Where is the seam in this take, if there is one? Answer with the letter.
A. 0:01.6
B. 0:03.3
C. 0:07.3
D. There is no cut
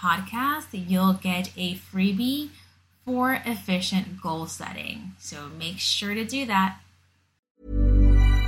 C